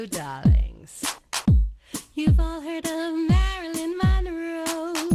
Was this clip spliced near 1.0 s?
yes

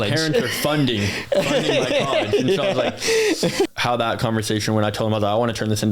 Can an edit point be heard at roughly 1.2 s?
no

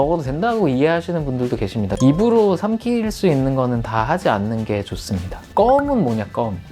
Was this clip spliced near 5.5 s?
yes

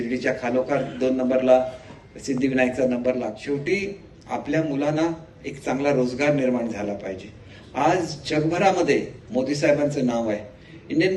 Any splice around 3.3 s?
yes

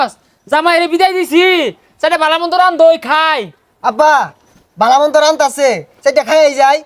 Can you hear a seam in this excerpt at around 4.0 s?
no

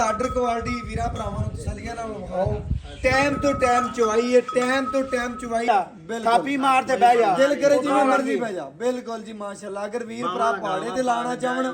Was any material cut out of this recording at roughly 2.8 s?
no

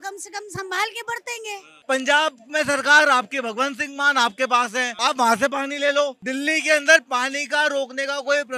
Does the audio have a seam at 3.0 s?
no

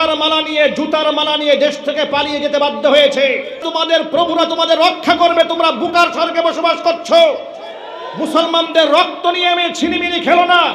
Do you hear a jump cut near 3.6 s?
yes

